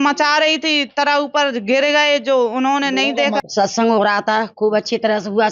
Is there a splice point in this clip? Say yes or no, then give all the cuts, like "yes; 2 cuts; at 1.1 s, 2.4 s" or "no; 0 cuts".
no; 0 cuts